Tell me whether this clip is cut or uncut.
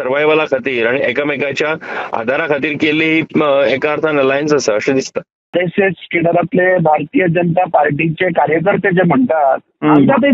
cut